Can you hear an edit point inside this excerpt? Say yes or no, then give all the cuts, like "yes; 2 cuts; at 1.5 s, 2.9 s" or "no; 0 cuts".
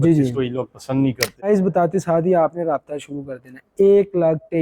yes; 1 cut; at 1.5 s